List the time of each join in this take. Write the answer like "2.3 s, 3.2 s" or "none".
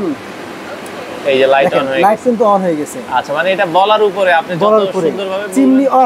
none